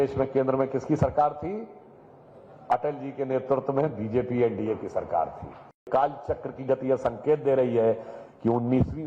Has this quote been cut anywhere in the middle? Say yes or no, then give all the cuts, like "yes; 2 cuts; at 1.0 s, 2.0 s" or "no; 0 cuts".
yes; 1 cut; at 5.8 s